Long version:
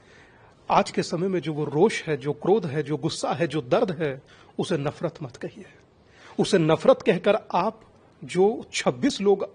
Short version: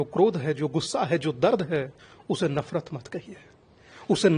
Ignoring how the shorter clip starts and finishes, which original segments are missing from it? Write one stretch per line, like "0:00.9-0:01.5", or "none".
none